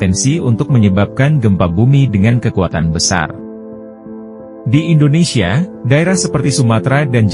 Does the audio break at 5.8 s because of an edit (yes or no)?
no